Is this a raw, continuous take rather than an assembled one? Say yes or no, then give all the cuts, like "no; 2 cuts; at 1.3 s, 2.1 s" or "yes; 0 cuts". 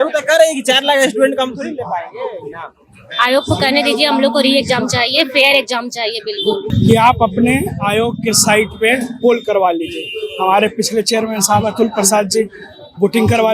no; 1 cut; at 6.7 s